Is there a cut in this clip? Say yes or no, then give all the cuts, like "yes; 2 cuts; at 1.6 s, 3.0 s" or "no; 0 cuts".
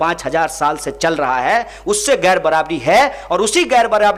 no; 0 cuts